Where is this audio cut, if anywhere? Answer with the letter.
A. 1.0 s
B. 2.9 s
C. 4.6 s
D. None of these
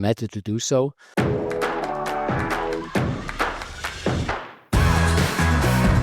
A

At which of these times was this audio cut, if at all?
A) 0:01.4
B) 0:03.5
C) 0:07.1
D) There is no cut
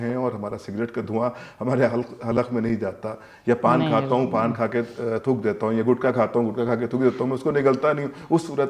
D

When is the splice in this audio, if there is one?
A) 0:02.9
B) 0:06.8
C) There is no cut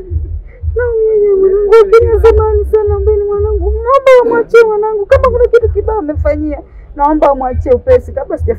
C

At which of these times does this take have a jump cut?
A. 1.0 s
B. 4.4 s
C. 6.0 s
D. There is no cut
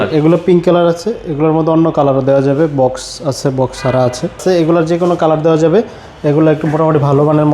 B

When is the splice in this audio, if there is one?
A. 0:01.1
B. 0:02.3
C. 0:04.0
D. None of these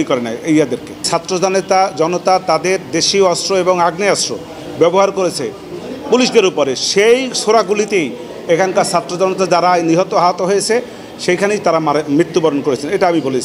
A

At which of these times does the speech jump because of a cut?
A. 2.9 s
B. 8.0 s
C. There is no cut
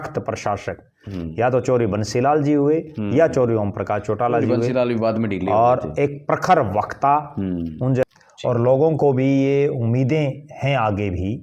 B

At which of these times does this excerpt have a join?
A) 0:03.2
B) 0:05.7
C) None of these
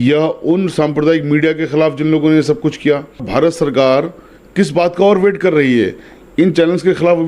A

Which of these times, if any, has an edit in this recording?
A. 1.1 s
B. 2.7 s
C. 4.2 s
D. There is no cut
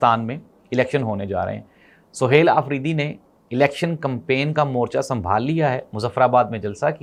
D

